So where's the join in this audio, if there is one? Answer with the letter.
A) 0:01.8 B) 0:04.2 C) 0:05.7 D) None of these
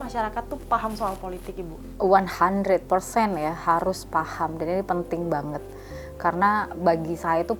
A